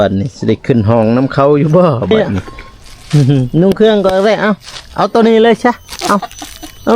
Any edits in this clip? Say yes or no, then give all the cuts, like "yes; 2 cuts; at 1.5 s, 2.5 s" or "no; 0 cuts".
yes; 1 cut; at 3.5 s